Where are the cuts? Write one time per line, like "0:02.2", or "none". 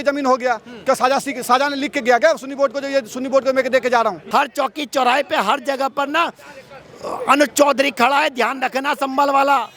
0:04.2